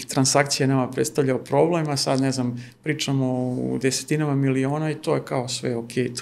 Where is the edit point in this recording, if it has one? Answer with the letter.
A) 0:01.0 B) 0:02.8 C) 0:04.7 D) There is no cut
D